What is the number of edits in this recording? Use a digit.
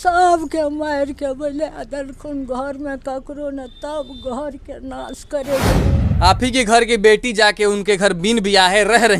1